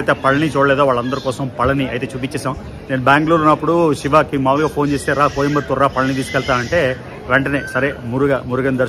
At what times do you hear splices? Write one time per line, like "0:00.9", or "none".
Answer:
none